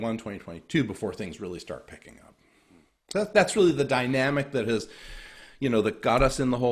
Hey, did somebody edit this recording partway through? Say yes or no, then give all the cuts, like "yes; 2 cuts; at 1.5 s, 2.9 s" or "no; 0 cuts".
no; 0 cuts